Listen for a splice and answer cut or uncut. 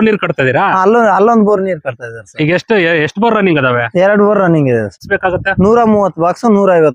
cut